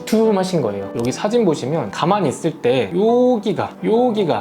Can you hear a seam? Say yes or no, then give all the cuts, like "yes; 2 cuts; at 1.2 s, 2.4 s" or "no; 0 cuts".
yes; 2 cuts; at 0.9 s, 1.9 s